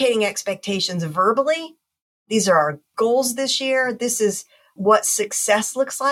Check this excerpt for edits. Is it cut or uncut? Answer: cut